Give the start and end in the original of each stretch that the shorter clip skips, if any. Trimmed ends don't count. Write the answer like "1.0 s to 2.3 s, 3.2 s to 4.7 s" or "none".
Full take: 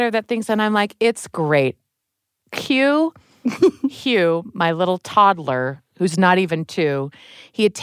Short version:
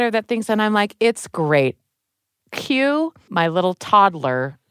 3.2 s to 4.5 s